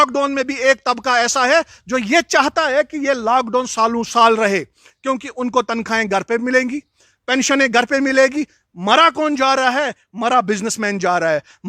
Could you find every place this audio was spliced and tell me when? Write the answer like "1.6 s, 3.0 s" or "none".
none